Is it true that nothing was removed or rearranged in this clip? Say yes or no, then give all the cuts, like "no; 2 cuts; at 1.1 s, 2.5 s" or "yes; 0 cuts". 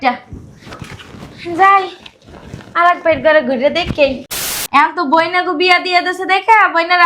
no; 1 cut; at 4.6 s